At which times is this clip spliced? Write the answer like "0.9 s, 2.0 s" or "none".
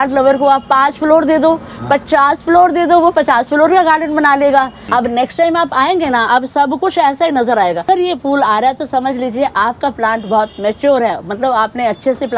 4.8 s, 7.9 s